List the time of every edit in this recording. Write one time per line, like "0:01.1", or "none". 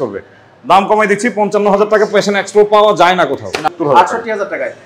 0:03.7